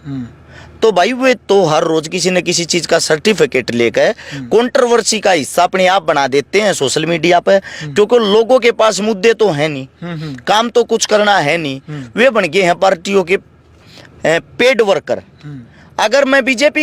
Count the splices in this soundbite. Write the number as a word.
zero